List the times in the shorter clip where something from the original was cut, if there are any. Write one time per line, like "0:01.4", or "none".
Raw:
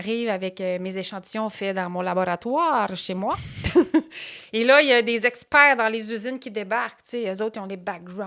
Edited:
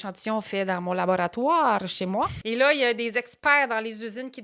0:02.4